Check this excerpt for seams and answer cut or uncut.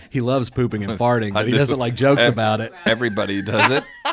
uncut